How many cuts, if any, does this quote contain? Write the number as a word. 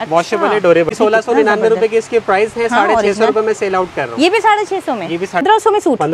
two